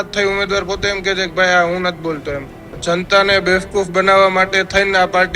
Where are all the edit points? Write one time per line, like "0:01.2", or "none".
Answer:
0:02.7